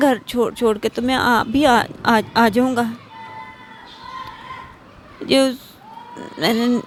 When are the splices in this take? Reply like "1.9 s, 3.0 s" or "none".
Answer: none